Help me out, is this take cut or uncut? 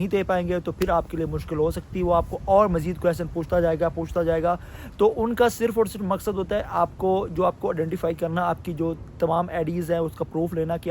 uncut